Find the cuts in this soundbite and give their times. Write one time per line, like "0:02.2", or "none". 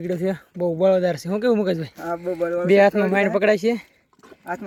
none